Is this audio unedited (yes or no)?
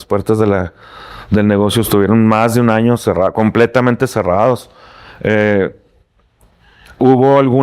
yes